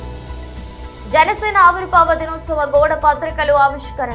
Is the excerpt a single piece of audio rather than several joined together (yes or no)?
no